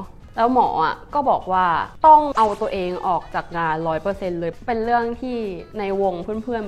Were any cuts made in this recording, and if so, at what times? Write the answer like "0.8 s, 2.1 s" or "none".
4.6 s